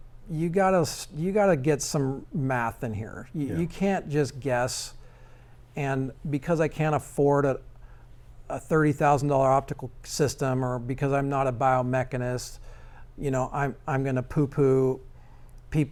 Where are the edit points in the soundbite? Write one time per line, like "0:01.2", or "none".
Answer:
none